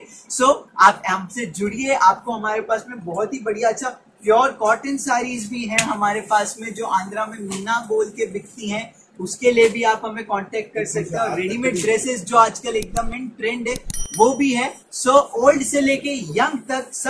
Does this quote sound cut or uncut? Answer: uncut